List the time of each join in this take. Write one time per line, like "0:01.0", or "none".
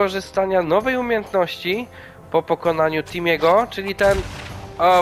none